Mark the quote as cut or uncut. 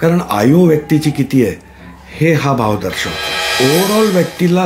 cut